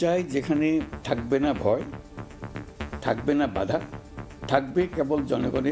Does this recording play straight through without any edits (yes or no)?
yes